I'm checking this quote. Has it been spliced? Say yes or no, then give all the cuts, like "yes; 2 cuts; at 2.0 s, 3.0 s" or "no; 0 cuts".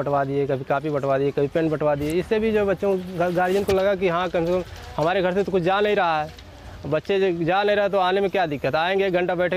no; 0 cuts